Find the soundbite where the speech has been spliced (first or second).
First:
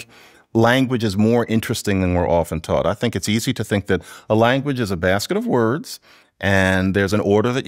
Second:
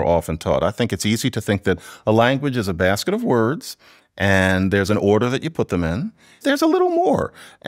second